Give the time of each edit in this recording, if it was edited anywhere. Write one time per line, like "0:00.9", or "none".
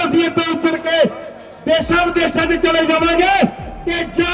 none